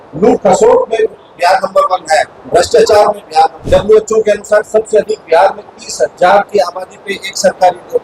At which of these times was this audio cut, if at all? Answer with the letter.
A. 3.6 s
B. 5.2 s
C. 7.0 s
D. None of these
A